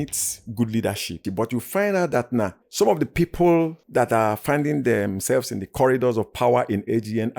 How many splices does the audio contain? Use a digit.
3